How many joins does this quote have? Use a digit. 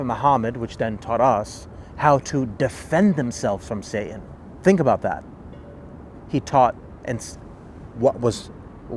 0